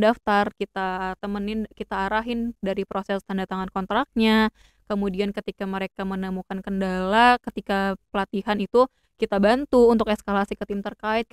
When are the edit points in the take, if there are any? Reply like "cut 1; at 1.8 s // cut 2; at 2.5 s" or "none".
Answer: none